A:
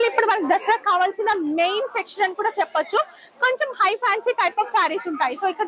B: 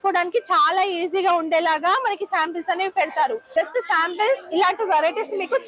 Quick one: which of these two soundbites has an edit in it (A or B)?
B